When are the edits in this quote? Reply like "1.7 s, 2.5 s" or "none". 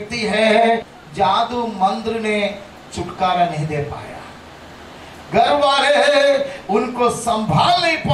1.0 s